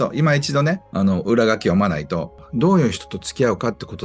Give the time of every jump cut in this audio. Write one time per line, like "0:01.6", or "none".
0:00.9
0:02.4